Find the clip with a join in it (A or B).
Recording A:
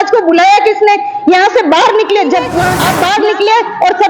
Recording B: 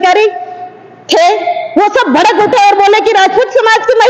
A